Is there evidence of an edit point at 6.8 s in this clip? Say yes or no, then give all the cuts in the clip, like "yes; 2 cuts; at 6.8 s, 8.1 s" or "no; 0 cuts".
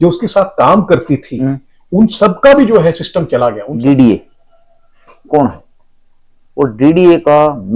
no; 1 cut; at 3.7 s